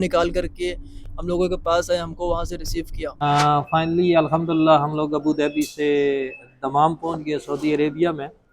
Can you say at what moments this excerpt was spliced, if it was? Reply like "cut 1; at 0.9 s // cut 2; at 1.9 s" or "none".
cut 1; at 3.2 s